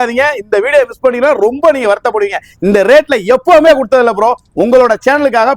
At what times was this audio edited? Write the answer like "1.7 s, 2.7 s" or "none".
none